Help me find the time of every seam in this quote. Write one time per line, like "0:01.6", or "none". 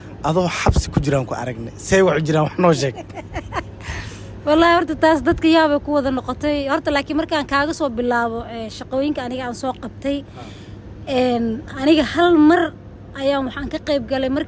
none